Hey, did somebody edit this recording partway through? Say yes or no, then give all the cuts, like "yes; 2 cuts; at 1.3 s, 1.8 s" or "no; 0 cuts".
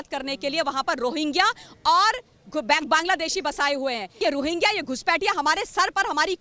yes; 1 cut; at 4.1 s